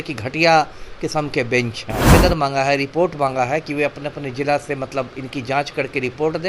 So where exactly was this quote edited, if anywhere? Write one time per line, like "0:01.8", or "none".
0:02.1